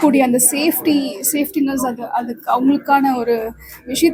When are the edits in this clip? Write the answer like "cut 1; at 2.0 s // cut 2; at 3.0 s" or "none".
none

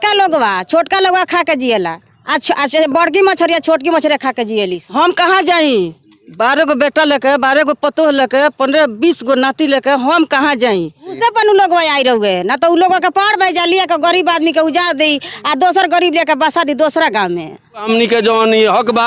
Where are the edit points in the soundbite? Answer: cut 1; at 4.8 s // cut 2; at 11.1 s // cut 3; at 17.8 s

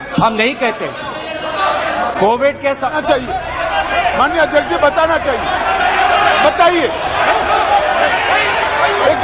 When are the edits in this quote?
none

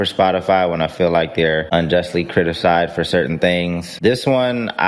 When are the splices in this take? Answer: cut 1; at 1.6 s // cut 2; at 3.8 s

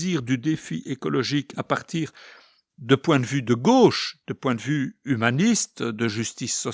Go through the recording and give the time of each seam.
none

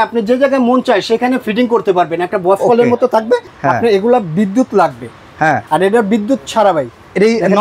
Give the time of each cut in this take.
cut 1; at 3.5 s

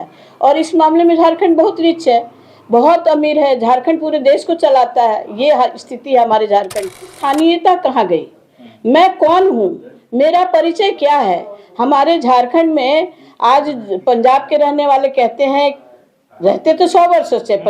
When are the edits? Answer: cut 1; at 7.2 s

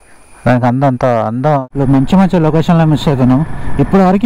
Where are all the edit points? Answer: cut 1; at 1.7 s

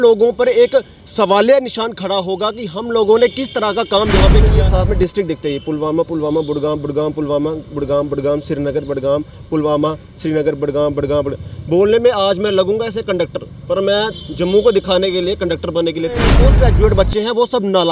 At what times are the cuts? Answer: cut 1; at 4.5 s // cut 2; at 16.4 s

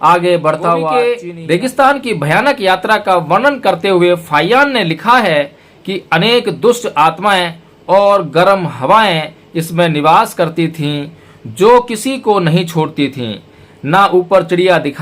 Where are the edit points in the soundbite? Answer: cut 1; at 1.0 s

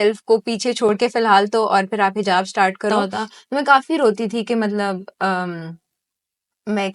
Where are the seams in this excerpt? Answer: cut 1; at 3.0 s

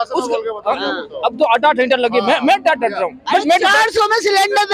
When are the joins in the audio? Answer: none

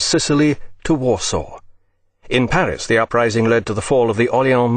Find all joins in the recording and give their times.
cut 1; at 2.8 s

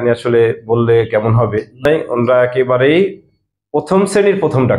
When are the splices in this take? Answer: cut 1; at 1.8 s

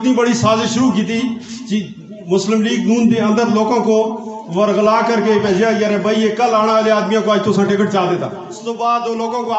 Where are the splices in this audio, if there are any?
cut 1; at 8.6 s

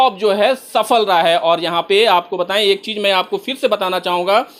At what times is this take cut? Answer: none

